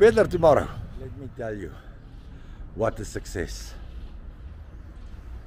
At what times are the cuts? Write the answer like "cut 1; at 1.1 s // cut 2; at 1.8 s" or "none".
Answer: cut 1; at 1.2 s